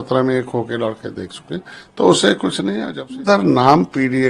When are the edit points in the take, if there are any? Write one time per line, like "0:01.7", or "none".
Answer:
0:02.9